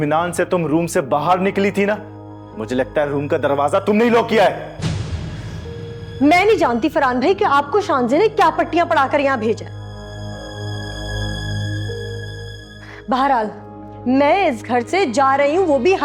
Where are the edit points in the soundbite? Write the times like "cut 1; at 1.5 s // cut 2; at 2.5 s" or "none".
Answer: none